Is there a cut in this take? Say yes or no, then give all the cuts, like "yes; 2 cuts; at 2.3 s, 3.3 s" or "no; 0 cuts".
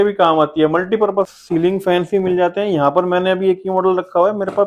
yes; 1 cut; at 1.3 s